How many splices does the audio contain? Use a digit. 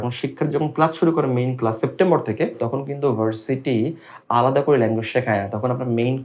0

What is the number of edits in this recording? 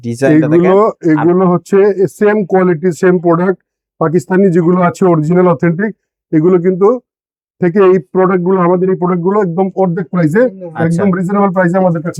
0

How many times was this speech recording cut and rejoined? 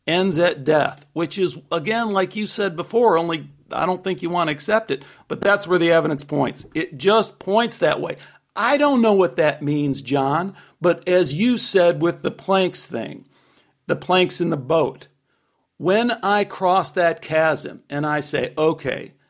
0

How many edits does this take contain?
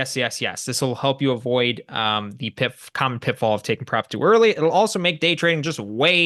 0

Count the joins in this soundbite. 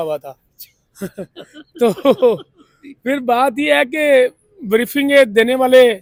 0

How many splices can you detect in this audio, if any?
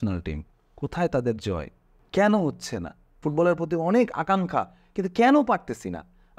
1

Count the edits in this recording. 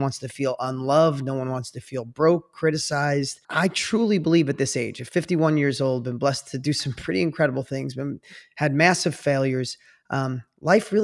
1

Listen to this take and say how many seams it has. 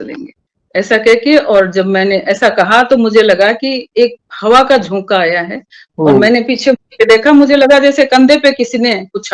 0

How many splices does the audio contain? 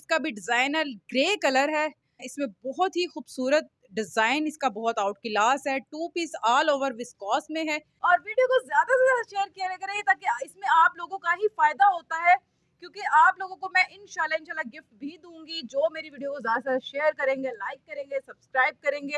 2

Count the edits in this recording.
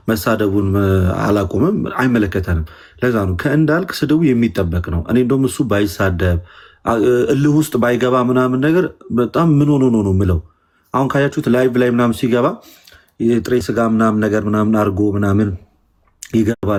0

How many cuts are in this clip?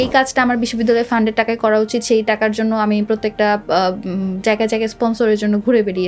0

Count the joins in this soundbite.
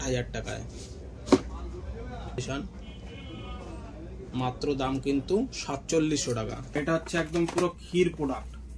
2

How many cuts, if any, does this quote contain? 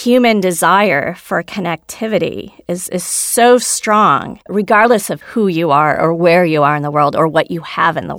2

